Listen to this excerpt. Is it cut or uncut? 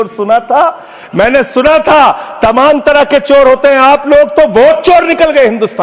uncut